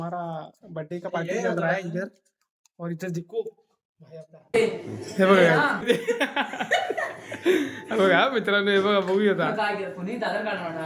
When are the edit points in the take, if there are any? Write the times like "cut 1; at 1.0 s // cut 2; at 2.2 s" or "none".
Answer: cut 1; at 4.6 s // cut 2; at 5.8 s